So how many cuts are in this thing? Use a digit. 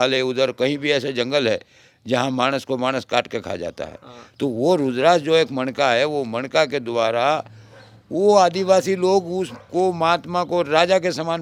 0